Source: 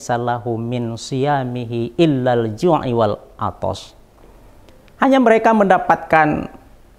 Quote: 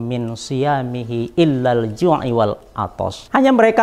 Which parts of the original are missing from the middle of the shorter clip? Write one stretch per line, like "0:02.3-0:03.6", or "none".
0:03.3-0:04.3